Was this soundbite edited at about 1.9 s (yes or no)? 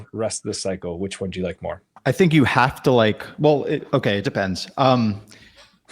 yes